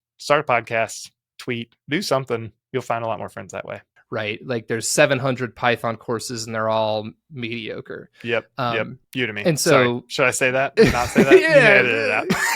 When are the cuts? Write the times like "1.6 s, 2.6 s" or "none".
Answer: 3.9 s, 9.0 s